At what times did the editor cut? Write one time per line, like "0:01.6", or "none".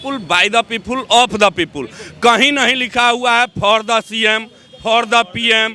none